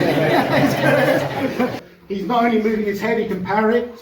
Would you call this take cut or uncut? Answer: cut